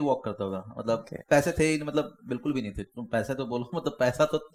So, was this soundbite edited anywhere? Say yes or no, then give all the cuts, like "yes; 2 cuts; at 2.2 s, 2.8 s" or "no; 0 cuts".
no; 0 cuts